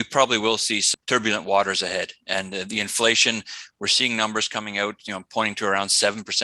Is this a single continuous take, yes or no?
no